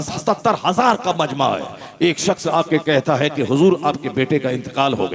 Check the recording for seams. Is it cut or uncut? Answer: uncut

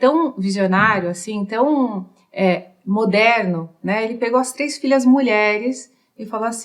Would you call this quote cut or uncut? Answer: uncut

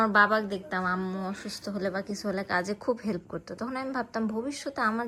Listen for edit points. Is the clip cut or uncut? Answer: uncut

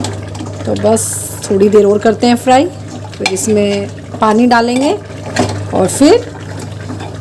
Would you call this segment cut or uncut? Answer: uncut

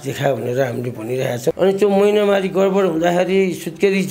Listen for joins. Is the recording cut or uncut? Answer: cut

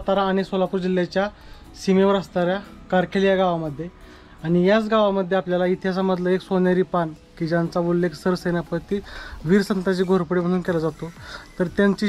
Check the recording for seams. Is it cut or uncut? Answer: uncut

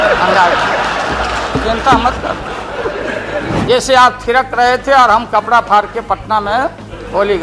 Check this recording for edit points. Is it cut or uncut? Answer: cut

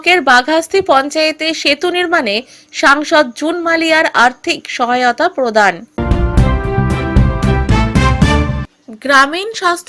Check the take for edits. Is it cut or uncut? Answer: cut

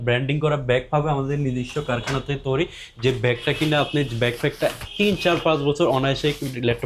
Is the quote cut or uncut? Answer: uncut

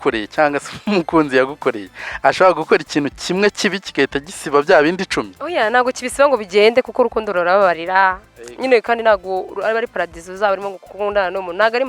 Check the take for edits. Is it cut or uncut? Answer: uncut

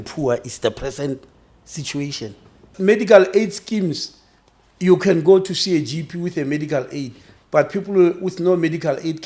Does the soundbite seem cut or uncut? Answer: cut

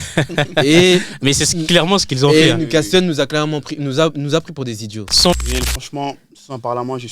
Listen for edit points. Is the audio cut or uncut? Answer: cut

